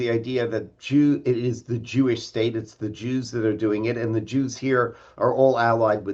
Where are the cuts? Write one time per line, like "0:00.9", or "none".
none